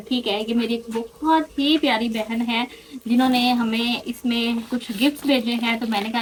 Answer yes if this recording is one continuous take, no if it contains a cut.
yes